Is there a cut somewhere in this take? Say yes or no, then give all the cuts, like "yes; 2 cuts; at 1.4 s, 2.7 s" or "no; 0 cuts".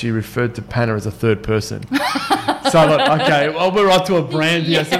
no; 0 cuts